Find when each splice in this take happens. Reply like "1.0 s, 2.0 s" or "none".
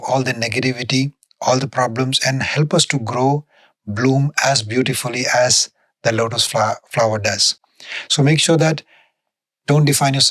none